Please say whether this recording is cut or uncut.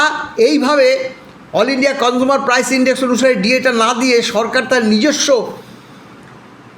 uncut